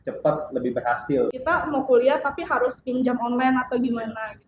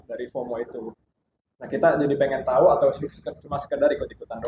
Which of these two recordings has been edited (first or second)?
first